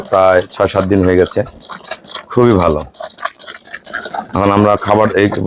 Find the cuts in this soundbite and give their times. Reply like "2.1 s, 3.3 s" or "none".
3.9 s